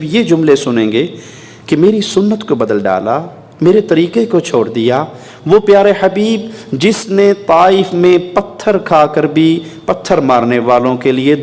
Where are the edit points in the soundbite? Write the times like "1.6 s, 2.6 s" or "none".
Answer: none